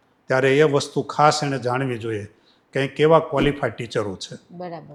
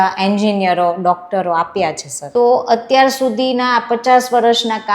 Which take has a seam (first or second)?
second